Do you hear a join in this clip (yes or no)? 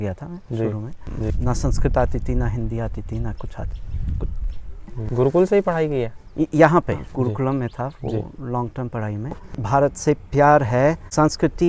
yes